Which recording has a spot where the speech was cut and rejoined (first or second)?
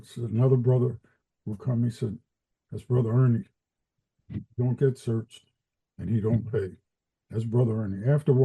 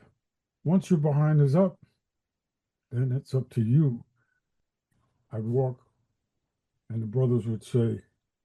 second